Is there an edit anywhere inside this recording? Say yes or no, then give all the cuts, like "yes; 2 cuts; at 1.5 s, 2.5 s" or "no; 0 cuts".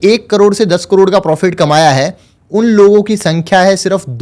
no; 0 cuts